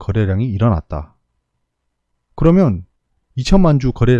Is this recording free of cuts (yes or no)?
yes